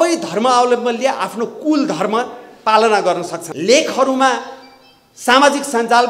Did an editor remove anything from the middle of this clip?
yes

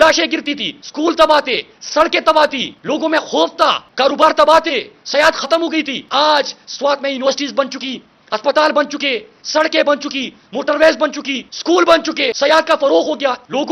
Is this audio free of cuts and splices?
yes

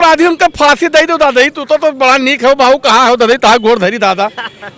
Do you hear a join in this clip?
no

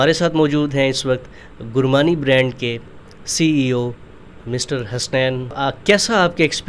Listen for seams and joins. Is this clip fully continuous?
no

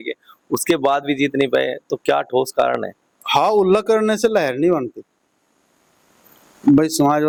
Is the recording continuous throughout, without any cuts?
yes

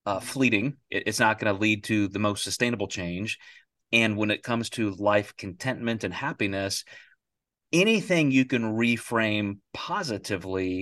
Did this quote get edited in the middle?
no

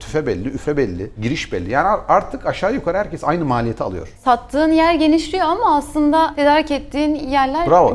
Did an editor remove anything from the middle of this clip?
yes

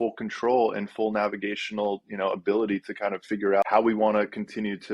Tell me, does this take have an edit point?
yes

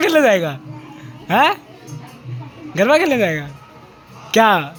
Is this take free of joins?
yes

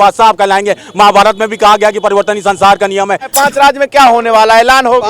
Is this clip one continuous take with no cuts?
no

